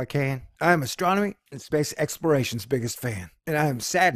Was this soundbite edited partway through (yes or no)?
no